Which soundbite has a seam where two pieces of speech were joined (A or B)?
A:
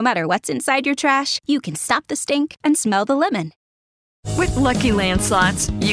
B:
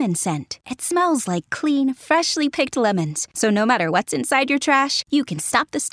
A